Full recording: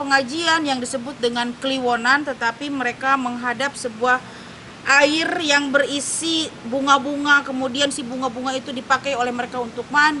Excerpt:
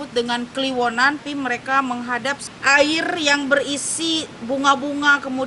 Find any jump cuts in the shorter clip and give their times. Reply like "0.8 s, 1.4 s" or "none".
1.2 s, 2.5 s